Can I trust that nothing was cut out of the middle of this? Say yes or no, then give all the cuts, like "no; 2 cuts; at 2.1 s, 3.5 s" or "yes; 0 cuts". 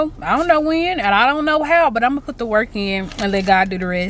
yes; 0 cuts